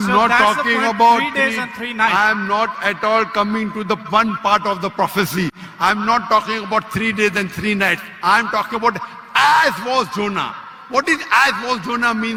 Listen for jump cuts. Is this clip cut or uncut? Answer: uncut